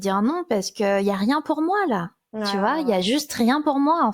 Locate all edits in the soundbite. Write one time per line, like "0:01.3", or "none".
none